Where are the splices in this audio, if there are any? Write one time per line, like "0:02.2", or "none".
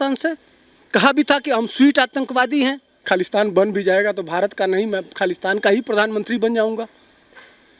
0:03.0